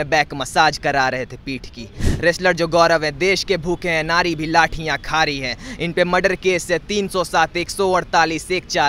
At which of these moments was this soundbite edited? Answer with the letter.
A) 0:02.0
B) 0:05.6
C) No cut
A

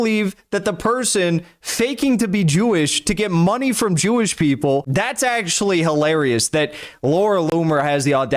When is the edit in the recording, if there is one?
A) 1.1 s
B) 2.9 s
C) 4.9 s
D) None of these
C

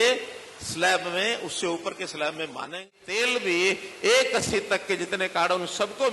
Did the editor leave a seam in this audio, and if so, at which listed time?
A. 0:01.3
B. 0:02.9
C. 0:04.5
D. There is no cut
B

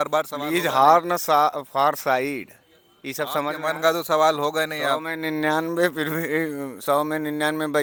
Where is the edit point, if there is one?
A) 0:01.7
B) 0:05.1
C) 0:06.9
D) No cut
D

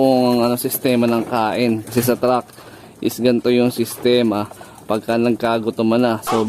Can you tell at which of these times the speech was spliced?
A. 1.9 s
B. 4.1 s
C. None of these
A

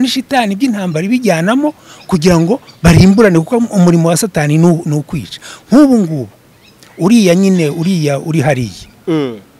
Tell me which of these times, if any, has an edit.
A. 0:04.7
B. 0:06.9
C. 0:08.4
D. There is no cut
D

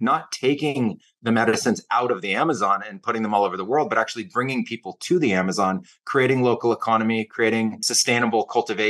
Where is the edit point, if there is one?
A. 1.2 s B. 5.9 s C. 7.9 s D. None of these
C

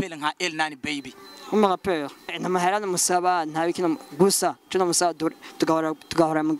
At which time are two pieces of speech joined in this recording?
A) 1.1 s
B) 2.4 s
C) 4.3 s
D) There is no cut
B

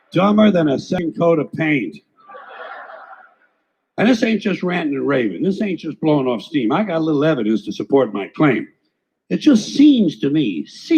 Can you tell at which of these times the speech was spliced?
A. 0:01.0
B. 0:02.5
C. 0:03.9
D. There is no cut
A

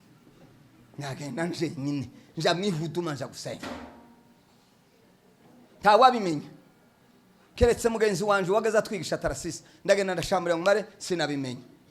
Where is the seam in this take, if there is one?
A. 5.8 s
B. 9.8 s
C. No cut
C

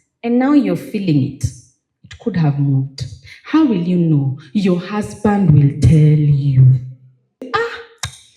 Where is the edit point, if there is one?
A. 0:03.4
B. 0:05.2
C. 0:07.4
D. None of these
C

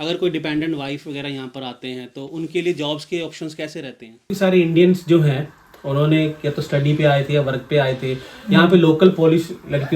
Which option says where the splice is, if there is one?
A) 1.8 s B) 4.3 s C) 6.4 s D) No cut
B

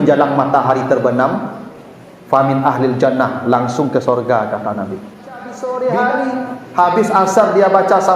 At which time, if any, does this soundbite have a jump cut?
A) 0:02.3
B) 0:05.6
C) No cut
B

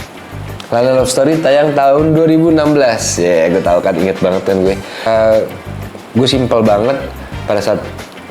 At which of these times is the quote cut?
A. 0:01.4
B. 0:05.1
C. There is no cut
B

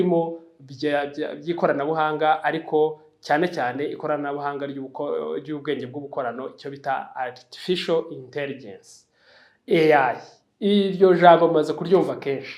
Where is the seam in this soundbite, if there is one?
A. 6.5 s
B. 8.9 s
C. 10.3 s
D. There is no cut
D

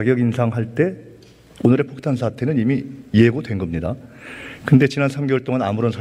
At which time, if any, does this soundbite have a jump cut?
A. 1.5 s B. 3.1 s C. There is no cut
C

